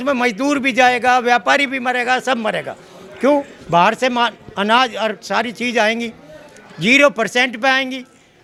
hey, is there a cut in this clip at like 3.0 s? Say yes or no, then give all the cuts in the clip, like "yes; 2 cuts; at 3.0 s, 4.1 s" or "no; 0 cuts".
no; 0 cuts